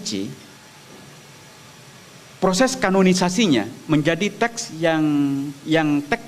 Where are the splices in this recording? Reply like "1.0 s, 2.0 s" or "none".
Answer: none